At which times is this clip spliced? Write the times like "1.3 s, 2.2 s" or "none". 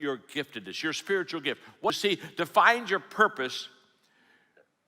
1.9 s